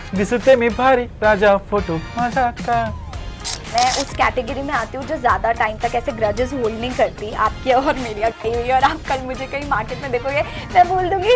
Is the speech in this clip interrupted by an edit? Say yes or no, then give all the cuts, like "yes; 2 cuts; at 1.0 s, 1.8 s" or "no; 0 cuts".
yes; 1 cut; at 3.6 s